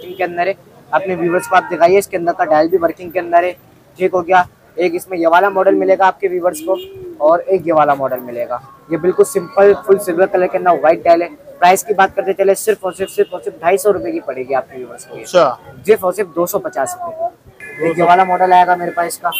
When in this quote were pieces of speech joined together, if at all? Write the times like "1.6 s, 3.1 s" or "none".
17.9 s

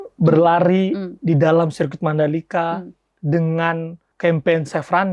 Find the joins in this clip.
4.0 s

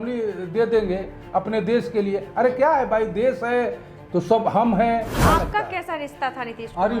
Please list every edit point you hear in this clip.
5.2 s

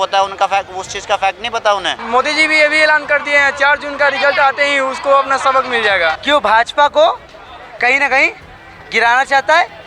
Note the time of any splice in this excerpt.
2.0 s, 6.2 s

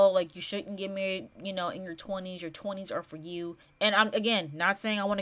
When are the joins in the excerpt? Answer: 3.6 s

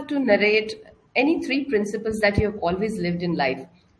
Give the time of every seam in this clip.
none

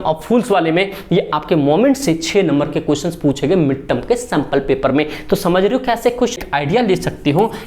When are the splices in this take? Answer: 6.4 s

